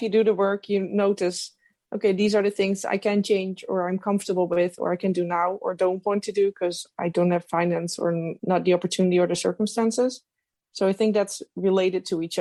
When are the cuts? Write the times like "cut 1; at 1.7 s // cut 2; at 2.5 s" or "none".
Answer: none